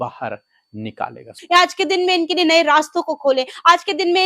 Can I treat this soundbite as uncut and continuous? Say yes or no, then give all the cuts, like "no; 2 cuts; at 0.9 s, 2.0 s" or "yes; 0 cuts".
no; 1 cut; at 1.3 s